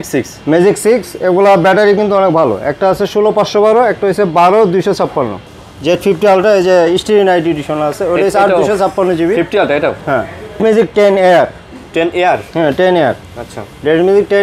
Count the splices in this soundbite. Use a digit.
2